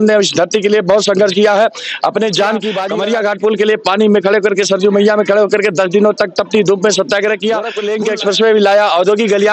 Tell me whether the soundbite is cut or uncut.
cut